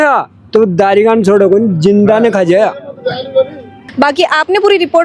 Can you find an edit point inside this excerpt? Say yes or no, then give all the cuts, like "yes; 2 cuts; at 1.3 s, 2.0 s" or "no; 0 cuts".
no; 0 cuts